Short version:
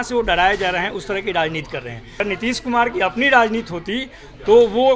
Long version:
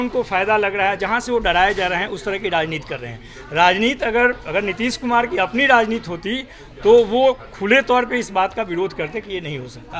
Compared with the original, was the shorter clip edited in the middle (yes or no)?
yes